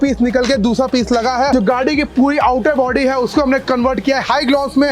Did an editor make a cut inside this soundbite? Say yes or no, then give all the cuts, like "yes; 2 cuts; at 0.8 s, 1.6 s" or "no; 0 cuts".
yes; 1 cut; at 1.5 s